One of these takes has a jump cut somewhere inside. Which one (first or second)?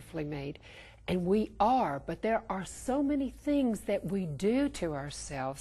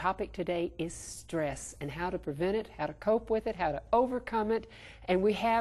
first